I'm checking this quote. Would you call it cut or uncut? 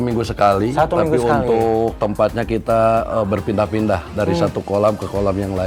uncut